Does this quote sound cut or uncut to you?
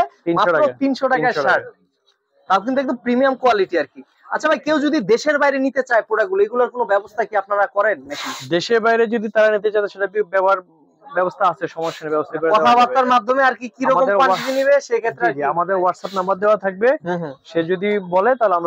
uncut